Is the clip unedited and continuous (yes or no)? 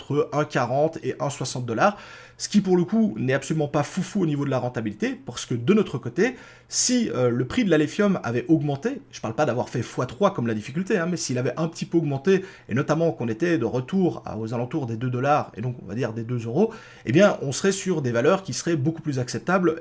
yes